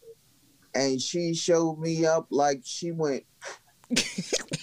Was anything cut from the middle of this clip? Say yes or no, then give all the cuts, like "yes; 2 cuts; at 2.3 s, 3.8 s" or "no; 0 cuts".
no; 0 cuts